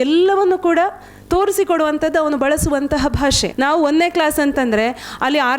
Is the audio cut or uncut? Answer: cut